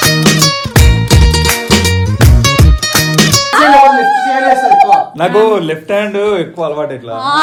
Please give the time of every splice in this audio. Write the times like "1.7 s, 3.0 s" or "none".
none